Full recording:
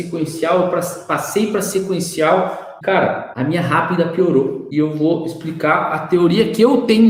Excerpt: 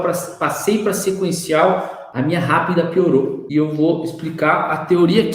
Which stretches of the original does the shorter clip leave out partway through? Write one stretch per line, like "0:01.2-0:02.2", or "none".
0:02.7-0:03.2